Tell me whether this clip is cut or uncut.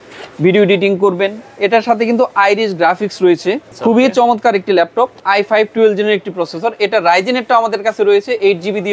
cut